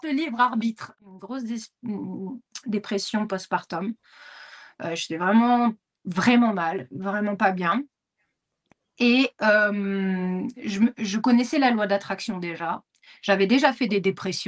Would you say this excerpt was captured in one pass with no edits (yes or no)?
no